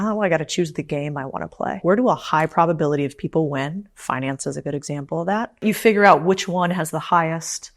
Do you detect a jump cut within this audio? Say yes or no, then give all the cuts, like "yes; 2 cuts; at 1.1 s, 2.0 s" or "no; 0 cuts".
yes; 2 cuts; at 1.8 s, 5.6 s